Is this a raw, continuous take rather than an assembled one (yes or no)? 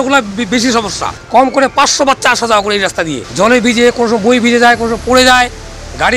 no